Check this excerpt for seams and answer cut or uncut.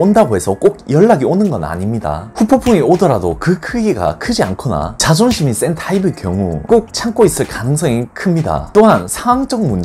uncut